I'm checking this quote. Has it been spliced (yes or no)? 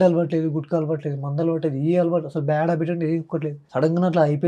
yes